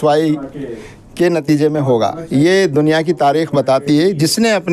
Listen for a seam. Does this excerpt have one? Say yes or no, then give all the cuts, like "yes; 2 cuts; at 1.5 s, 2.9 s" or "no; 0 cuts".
no; 0 cuts